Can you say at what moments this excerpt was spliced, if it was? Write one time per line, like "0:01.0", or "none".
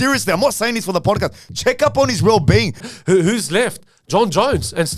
0:02.9